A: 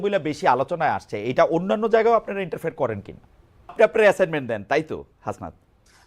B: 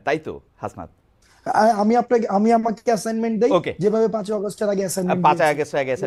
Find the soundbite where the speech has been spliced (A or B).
A